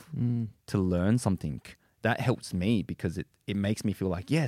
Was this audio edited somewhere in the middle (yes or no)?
yes